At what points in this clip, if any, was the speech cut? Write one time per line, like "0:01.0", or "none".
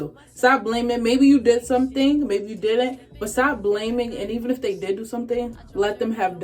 none